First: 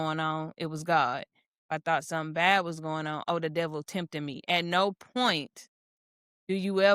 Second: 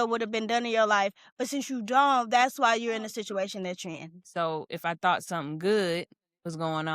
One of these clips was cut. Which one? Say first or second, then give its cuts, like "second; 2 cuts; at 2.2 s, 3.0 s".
second; 1 cut; at 4.1 s